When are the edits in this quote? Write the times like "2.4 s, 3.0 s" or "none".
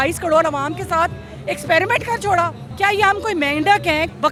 none